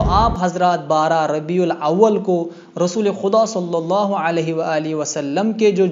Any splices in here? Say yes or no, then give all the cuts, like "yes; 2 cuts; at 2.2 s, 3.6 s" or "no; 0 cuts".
no; 0 cuts